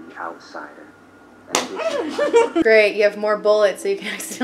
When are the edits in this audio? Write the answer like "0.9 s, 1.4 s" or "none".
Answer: 2.6 s